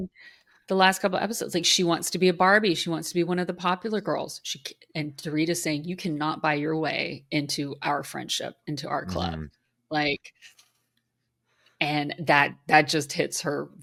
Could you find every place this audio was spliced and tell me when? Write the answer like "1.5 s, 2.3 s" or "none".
none